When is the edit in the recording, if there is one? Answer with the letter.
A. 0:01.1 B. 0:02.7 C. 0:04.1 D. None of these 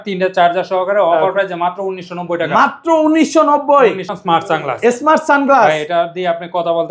C